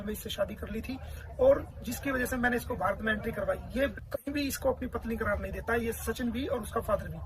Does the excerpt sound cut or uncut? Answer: cut